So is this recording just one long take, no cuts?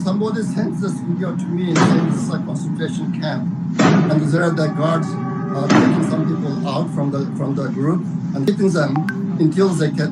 yes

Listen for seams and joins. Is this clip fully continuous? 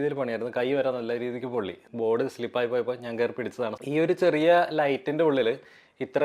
no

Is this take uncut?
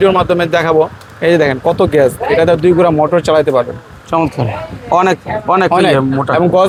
yes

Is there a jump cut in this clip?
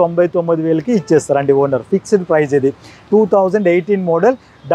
no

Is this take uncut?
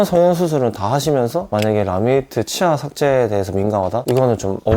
yes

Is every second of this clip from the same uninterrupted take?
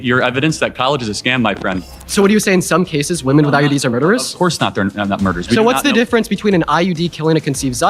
no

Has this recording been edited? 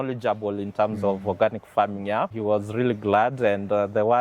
yes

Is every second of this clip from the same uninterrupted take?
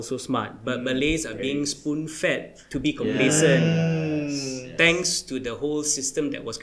yes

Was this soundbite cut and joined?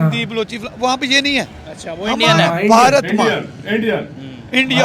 no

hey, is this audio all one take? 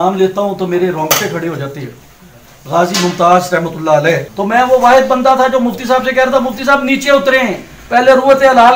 no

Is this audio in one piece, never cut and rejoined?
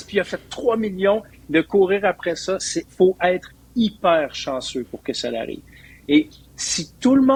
yes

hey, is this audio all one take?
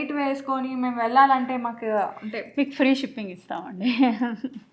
yes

